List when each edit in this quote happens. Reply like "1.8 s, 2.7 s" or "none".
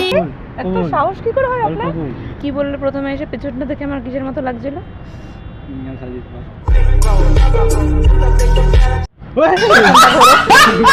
2.3 s

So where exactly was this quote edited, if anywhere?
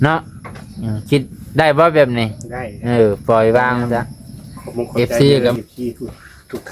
5.6 s

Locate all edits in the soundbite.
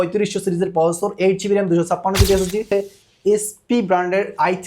2.6 s

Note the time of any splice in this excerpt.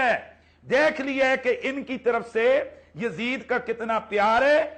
none

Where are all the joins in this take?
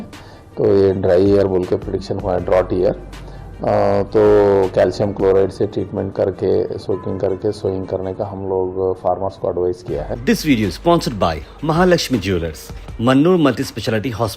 10.1 s

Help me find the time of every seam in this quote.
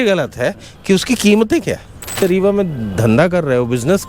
2.2 s

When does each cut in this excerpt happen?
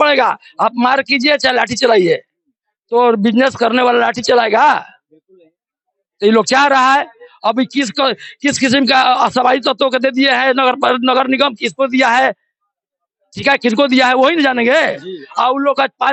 none

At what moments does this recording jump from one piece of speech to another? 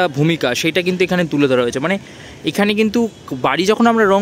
none

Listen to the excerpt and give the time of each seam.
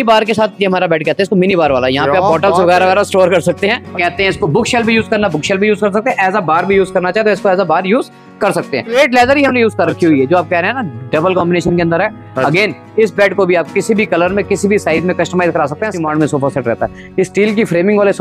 3.9 s, 8.9 s, 16.0 s

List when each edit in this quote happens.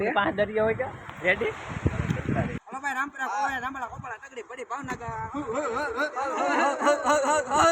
2.6 s

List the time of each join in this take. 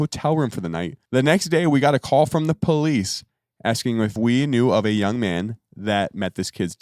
1.0 s, 4.1 s

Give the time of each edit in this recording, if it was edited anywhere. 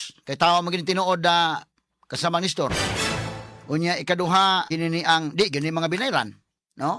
4.7 s

